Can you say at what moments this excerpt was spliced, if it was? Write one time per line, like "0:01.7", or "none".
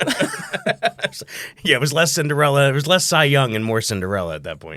none